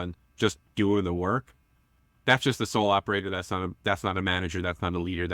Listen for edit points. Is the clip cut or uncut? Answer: uncut